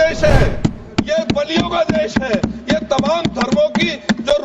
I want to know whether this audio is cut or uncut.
uncut